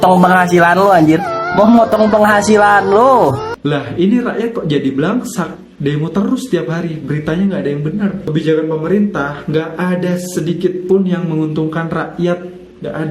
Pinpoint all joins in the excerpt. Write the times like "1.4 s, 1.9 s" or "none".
3.5 s